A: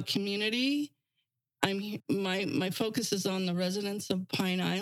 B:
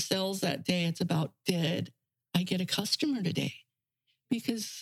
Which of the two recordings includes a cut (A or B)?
A